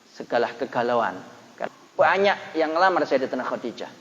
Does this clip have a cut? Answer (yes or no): yes